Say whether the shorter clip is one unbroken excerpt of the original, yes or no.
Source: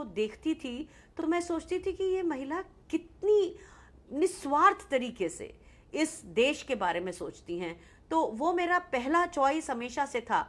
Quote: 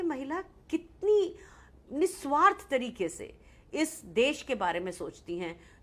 yes